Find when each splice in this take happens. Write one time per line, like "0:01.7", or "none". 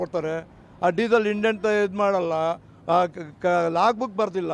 none